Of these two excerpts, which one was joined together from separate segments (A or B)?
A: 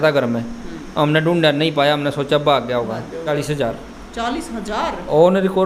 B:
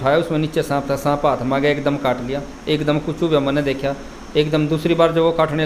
A